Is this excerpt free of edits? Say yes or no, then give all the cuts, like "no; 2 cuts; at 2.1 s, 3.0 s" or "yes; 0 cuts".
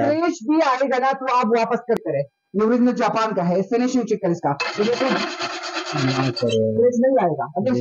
no; 1 cut; at 2.0 s